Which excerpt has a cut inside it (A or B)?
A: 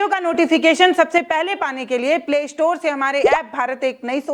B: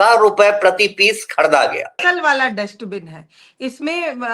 B